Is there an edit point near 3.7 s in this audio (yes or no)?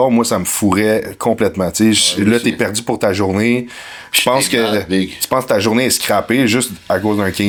no